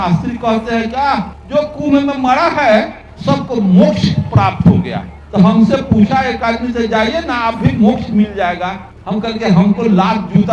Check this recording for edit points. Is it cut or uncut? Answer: uncut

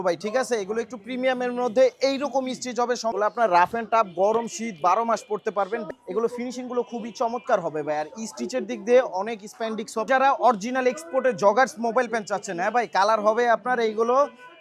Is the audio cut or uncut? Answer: cut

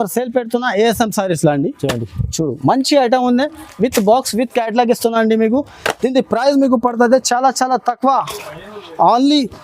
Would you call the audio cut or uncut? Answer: uncut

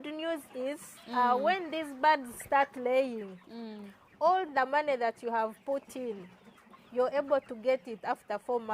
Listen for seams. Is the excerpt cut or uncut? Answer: uncut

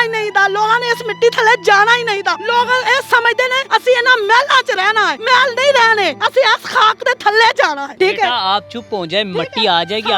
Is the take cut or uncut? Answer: cut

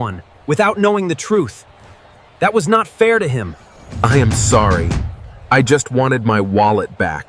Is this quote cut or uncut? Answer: cut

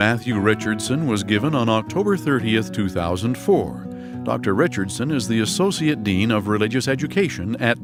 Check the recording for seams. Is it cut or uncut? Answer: uncut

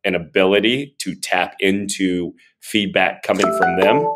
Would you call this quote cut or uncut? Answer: uncut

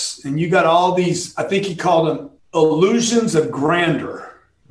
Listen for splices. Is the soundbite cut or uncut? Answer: cut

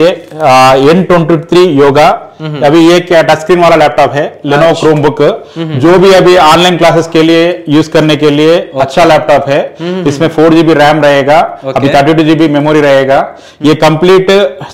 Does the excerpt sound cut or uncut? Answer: uncut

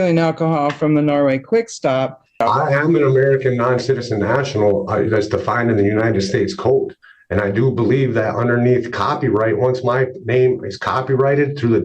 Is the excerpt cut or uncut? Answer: cut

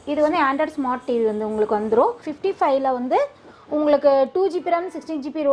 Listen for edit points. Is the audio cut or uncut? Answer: cut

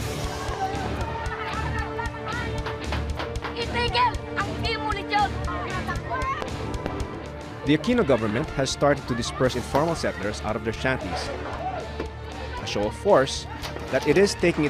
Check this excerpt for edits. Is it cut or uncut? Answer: uncut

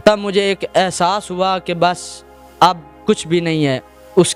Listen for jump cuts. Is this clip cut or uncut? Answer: uncut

